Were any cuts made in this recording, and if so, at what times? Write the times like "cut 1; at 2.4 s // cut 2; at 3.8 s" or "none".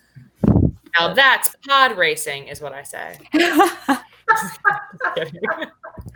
none